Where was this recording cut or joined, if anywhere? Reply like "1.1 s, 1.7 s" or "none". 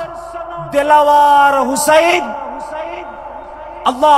none